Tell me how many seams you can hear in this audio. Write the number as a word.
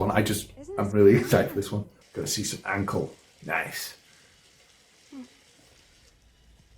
one